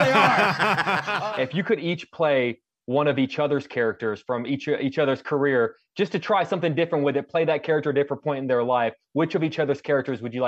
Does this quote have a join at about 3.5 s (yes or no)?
no